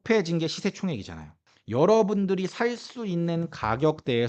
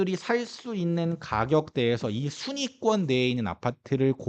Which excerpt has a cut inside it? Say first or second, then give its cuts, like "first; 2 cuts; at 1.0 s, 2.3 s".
first; 1 cut; at 1.4 s